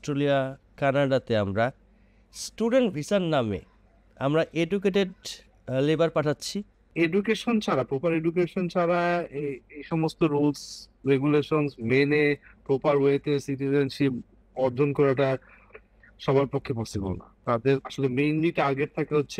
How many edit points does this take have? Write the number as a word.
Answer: two